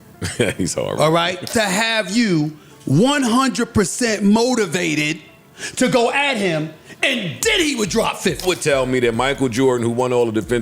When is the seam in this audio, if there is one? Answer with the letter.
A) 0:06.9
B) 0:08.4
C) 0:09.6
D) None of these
B